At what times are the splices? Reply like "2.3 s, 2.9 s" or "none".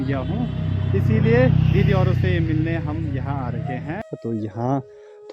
4.1 s